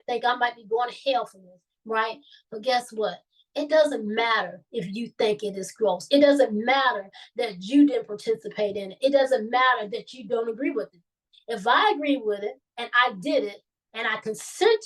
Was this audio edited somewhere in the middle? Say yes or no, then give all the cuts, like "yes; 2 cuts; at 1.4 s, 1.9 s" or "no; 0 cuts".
no; 0 cuts